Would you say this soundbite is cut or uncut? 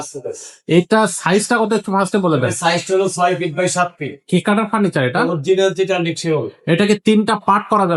uncut